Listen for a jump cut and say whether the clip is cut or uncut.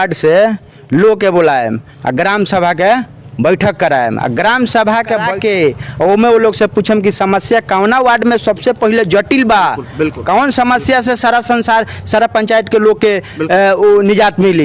cut